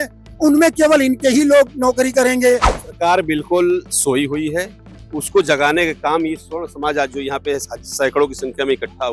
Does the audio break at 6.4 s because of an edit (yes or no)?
no